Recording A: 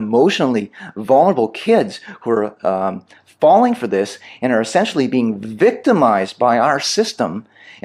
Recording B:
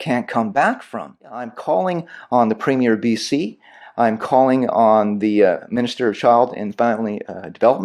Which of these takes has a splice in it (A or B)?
B